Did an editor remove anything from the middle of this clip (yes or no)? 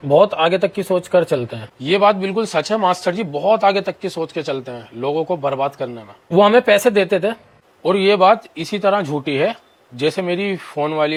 no